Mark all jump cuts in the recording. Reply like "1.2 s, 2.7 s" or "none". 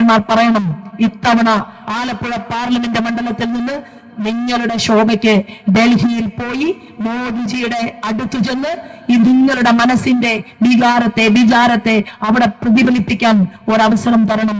none

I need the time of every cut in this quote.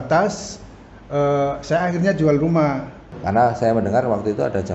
3.1 s

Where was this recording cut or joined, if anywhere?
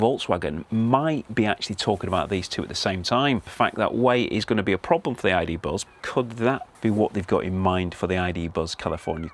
3.5 s, 5.9 s, 6.7 s

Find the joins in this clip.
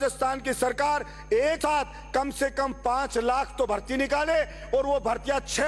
1.6 s

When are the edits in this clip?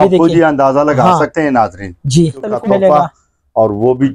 2.5 s

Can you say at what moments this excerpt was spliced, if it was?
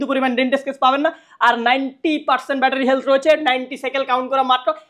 none

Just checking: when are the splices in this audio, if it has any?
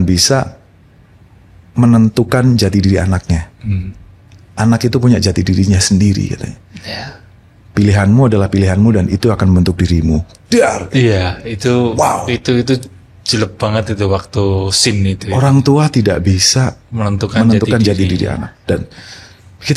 none

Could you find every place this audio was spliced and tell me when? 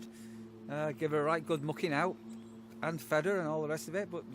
none

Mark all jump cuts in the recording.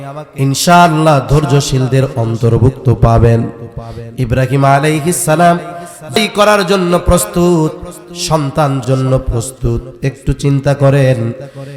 6.2 s, 8.8 s

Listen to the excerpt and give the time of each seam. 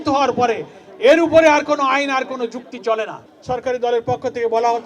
3.3 s

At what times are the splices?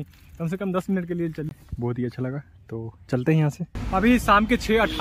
1.5 s, 3.7 s

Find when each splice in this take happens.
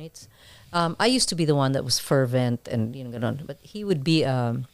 none

